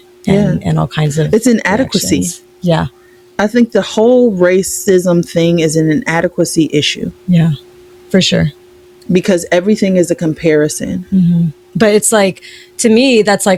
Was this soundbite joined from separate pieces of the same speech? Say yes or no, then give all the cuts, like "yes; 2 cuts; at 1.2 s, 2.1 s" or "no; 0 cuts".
no; 0 cuts